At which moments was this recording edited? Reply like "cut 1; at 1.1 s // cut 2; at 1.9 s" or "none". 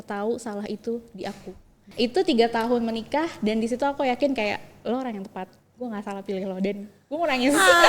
cut 1; at 1.8 s // cut 2; at 4.7 s